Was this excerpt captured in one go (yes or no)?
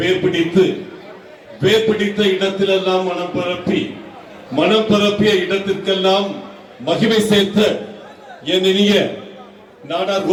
yes